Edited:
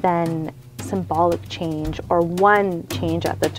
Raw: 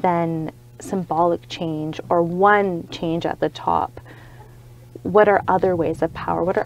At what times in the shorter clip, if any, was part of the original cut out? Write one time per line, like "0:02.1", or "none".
none